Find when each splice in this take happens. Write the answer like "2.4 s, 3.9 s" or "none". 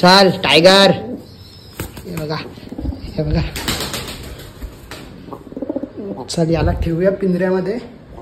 none